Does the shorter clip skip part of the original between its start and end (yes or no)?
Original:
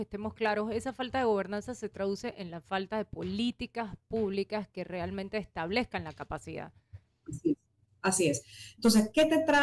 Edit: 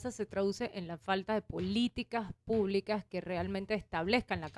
no